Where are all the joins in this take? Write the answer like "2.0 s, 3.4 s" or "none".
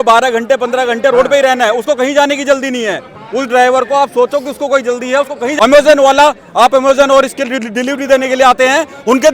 5.5 s